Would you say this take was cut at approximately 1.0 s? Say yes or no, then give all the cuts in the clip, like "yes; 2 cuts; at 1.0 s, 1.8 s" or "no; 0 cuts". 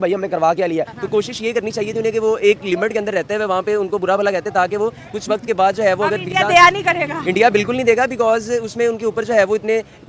yes; 1 cut; at 1.0 s